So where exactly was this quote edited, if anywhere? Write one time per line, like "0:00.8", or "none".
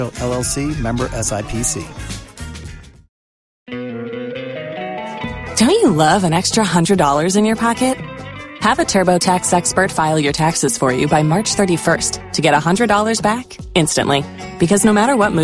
0:03.6